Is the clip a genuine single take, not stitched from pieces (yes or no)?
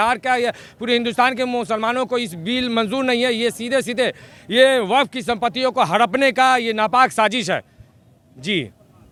yes